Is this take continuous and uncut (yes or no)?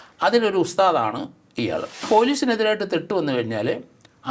no